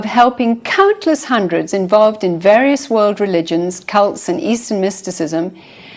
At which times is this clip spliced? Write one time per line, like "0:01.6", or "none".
none